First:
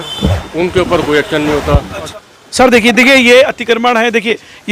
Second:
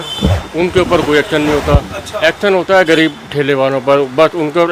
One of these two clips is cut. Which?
first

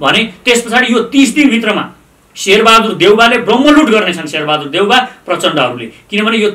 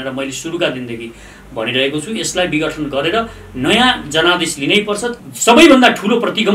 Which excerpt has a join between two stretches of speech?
second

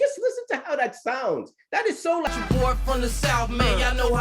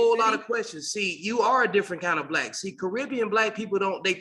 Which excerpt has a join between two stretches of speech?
first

